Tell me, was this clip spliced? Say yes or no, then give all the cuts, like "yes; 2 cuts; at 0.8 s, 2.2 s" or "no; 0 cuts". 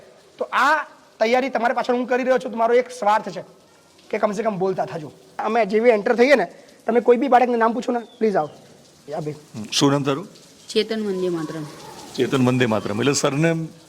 yes; 1 cut; at 5.4 s